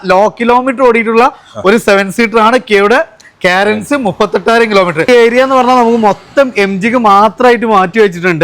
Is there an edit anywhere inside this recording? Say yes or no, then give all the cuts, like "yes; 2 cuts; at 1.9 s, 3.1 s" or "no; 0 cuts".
yes; 1 cut; at 5.0 s